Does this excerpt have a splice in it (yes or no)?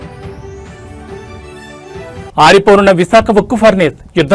no